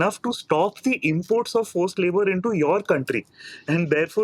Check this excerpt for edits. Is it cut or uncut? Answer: uncut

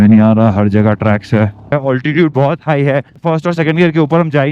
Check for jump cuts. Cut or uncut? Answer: cut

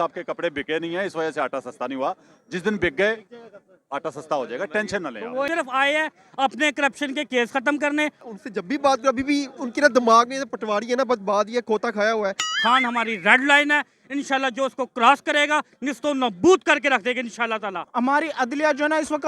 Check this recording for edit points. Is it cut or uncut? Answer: cut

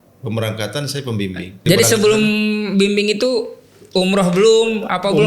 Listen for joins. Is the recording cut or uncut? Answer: cut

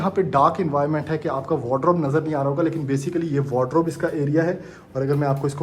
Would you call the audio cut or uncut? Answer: uncut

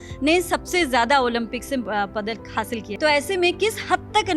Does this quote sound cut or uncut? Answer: cut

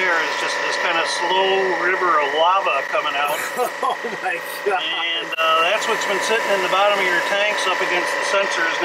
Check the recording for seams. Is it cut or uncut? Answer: uncut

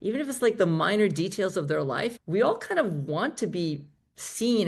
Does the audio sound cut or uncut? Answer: cut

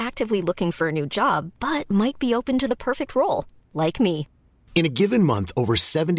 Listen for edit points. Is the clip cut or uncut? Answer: uncut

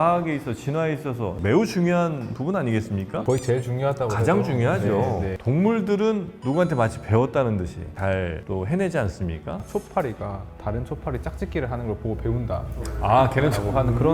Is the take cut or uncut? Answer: cut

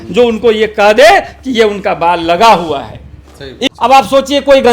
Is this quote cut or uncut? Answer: cut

